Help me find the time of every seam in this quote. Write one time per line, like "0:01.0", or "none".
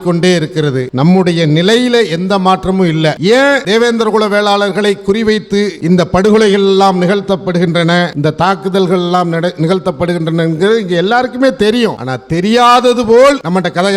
none